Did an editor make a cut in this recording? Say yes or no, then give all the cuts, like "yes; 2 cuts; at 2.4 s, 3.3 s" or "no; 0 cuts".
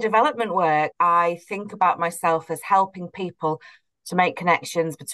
yes; 1 cut; at 0.9 s